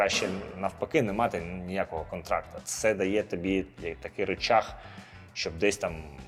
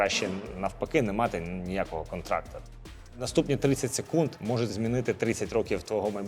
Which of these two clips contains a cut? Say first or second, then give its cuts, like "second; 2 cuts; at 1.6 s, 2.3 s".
second; 2 cuts; at 2.8 s, 4.6 s